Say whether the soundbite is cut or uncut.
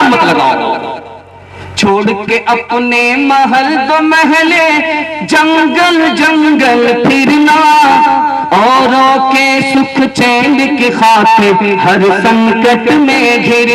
uncut